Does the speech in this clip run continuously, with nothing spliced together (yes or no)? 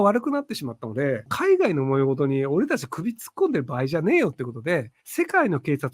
no